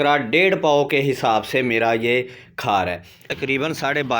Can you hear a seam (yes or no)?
yes